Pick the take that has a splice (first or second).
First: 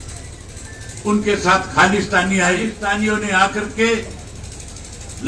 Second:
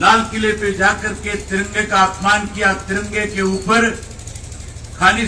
first